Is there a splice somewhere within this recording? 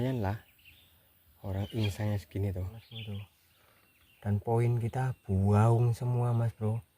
yes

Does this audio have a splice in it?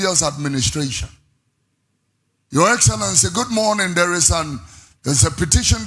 no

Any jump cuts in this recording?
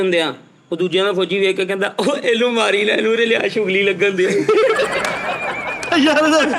no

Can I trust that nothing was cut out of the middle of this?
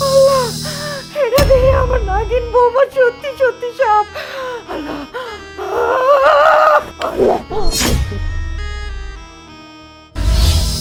yes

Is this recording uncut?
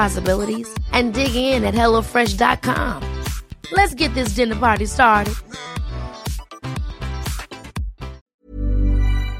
no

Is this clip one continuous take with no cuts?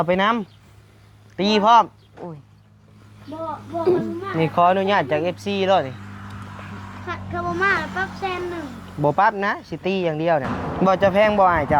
no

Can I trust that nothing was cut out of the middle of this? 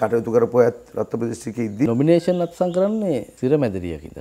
no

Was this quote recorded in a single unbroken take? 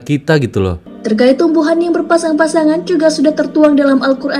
no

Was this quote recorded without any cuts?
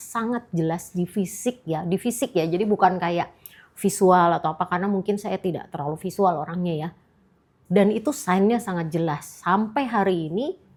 yes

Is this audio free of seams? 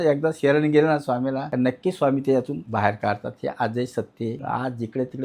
no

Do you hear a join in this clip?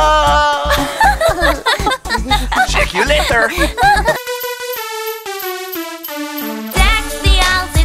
yes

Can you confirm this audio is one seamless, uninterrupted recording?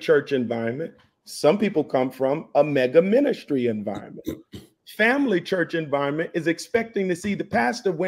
no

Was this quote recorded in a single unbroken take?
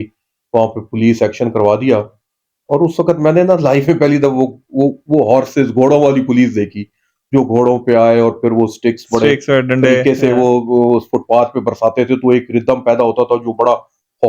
yes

